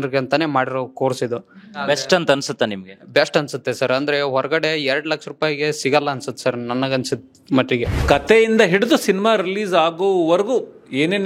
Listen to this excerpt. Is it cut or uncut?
cut